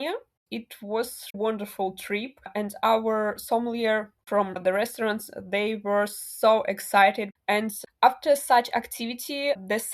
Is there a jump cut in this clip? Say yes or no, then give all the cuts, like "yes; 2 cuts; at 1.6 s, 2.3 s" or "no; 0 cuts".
yes; 3 cuts; at 1.4 s, 4.6 s, 7.5 s